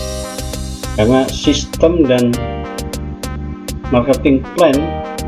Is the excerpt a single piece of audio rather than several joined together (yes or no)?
no